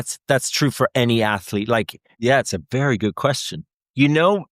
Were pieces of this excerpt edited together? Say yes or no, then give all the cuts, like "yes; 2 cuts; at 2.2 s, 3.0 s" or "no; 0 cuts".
yes; 1 cut; at 2.1 s